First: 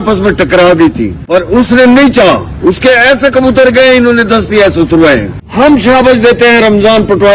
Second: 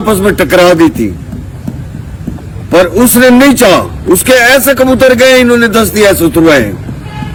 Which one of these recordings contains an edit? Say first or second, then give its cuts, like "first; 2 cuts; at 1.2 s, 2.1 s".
first; 2 cuts; at 1.2 s, 5.4 s